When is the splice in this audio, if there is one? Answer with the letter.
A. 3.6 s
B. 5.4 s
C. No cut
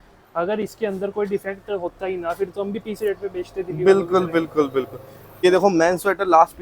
B